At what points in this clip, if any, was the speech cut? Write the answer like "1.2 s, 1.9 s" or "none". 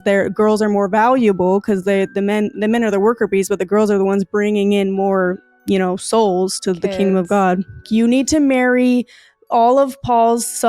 7.9 s